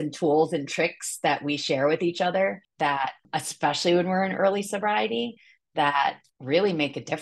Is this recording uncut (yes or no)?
no